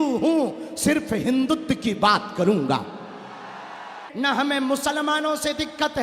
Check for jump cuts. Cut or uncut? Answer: cut